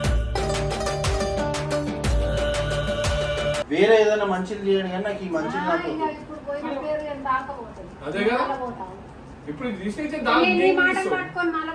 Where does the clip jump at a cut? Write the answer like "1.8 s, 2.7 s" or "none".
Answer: 3.6 s